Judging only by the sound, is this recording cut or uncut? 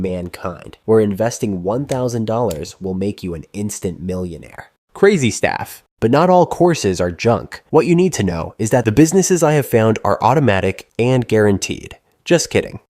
cut